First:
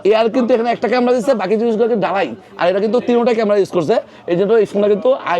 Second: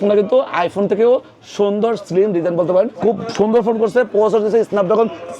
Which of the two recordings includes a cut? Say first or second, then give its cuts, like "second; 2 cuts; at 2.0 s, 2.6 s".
second; 1 cut; at 2.9 s